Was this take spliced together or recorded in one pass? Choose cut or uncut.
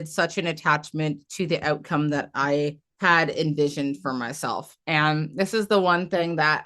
cut